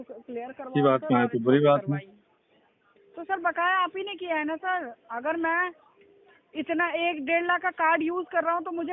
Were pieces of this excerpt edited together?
no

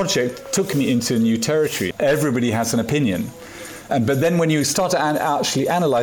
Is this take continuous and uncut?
no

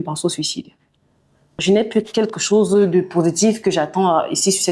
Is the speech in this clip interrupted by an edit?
yes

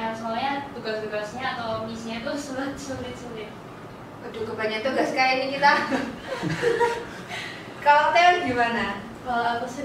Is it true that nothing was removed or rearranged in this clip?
yes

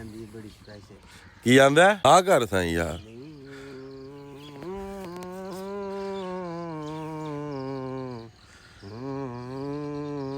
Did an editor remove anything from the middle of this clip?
yes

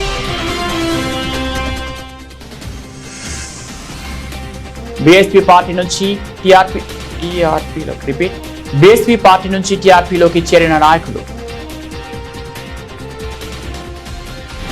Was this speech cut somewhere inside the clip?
no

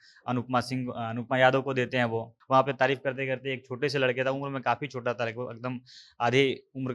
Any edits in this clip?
yes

